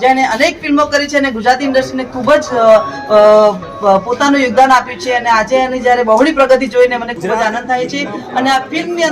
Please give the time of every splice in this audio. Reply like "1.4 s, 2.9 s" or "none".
none